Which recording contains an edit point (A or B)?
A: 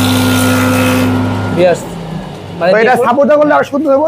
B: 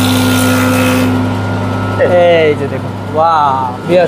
A